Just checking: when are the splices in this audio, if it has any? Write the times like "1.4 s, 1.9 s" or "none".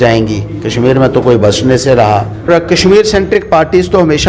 2.5 s